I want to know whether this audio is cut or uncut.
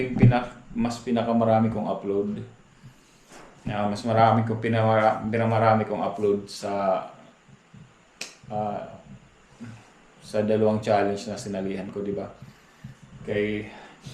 uncut